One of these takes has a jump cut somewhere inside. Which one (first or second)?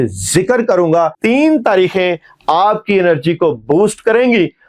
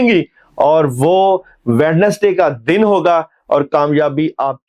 first